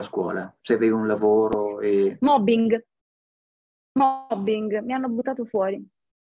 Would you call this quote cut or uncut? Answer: uncut